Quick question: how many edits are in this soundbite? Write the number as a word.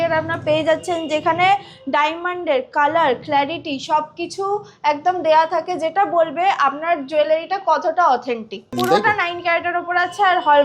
one